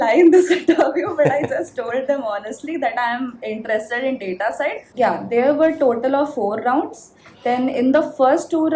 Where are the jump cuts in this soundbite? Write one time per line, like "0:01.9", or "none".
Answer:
0:04.8